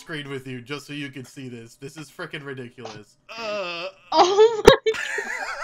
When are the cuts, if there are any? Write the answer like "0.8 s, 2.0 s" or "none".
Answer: 3.1 s